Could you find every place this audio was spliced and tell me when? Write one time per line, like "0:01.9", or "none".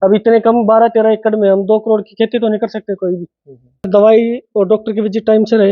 0:03.9